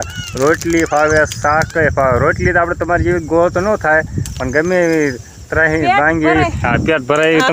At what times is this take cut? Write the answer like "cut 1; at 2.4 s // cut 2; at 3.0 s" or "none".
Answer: none

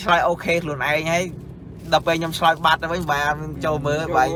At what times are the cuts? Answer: none

